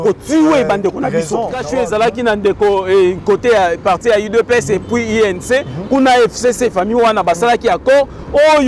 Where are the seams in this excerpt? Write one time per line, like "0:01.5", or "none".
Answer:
0:01.6